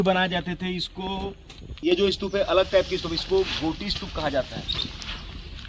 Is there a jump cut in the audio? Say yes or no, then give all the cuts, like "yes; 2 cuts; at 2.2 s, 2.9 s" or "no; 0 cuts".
yes; 1 cut; at 1.8 s